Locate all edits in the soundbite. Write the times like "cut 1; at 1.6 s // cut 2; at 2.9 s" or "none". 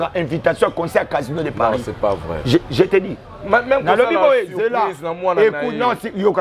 none